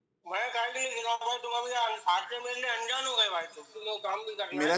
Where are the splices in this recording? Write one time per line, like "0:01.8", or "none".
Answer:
0:03.8